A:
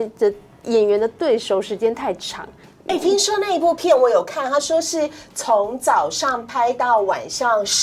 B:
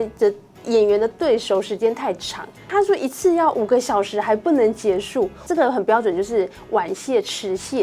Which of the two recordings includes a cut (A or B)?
B